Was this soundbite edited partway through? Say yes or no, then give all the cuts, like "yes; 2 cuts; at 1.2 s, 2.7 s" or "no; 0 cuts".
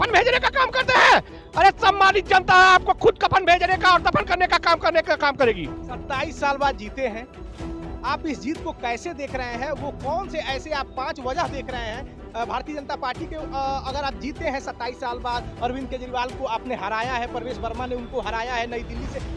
no; 0 cuts